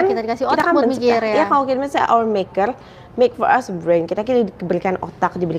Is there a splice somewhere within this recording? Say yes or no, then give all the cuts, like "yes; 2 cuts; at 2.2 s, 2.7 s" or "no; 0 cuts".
no; 0 cuts